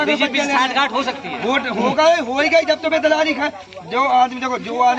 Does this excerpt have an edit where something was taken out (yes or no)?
no